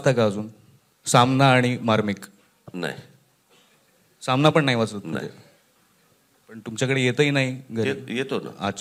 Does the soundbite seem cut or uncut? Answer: uncut